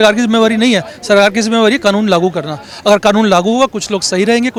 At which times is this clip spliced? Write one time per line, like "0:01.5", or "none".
none